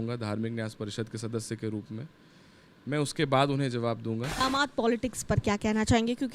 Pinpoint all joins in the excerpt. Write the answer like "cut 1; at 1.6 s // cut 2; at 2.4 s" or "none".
cut 1; at 4.3 s

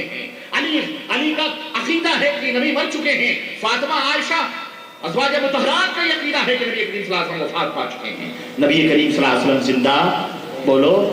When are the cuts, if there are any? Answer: none

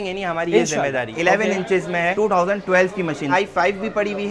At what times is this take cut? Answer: cut 1; at 1.1 s // cut 2; at 3.3 s

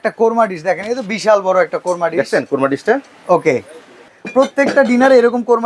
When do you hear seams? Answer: cut 1; at 4.1 s

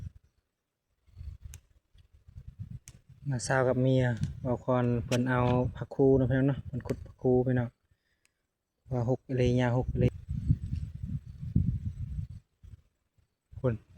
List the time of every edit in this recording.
cut 1; at 10.1 s

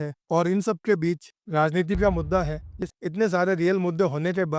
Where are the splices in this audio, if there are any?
cut 1; at 2.8 s

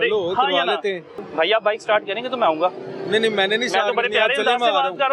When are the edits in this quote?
cut 1; at 1.2 s

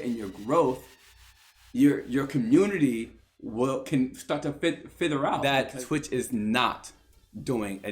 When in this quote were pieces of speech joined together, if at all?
cut 1; at 5.4 s

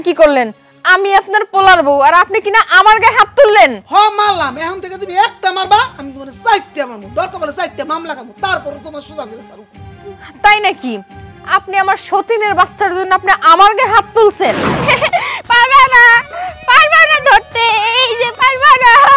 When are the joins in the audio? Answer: cut 1; at 14.7 s

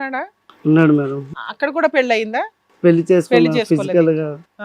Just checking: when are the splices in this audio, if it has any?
cut 1; at 1.4 s

